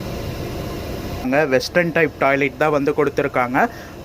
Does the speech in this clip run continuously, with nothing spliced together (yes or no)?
no